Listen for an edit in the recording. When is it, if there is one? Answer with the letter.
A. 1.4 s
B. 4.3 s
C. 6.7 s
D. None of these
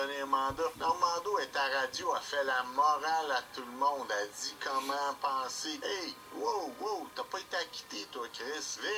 B